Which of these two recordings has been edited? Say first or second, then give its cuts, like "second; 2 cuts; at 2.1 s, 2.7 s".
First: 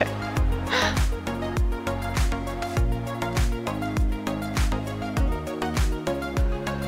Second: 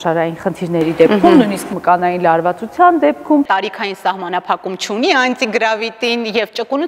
second; 1 cut; at 3.5 s